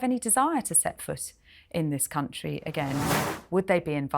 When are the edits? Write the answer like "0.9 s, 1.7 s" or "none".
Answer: 3.2 s